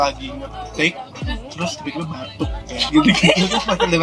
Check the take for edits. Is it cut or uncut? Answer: cut